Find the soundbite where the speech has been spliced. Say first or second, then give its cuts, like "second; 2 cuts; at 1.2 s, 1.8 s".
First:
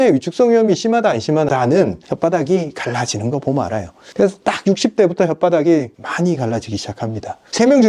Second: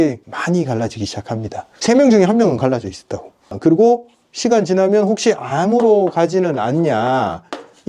second; 1 cut; at 3.5 s